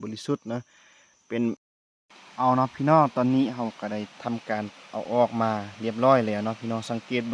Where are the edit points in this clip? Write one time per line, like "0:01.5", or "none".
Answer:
0:01.7

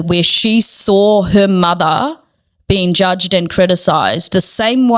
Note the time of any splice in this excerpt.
none

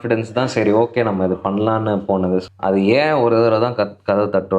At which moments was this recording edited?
0:02.4

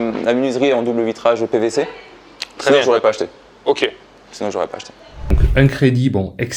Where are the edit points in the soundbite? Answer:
0:05.3

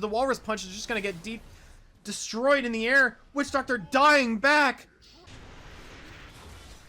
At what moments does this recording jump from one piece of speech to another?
0:05.5

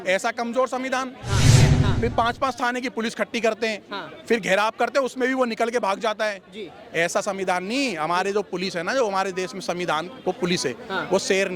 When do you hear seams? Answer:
0:01.7

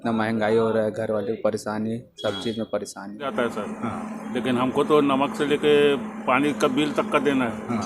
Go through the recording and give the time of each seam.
0:03.3

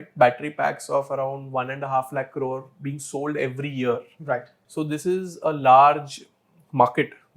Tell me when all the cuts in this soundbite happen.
0:04.6

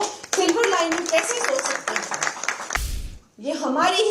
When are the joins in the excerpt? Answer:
0:02.9

